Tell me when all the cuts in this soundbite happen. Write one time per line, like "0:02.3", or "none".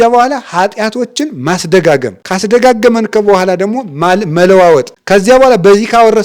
0:02.2
0:05.0